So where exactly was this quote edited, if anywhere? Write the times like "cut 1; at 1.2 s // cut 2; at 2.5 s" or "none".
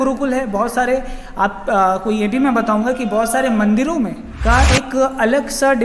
cut 1; at 4.3 s